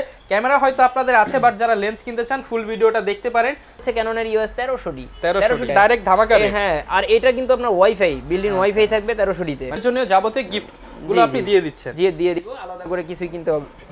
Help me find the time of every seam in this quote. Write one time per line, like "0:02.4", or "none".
0:03.8
0:05.7
0:09.8